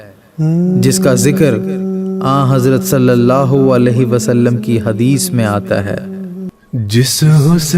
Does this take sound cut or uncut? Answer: cut